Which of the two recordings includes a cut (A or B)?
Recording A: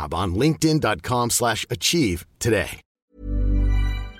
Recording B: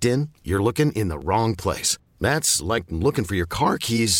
A